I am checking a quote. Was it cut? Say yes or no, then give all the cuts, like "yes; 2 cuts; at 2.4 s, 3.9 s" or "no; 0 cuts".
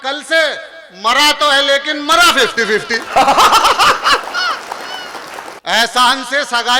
yes; 1 cut; at 5.5 s